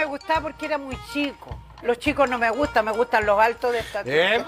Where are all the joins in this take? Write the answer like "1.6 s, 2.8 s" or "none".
1.7 s